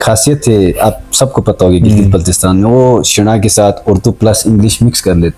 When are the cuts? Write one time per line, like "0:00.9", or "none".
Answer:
none